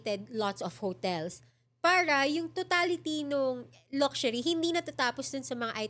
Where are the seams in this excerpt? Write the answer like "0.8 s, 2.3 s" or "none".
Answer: none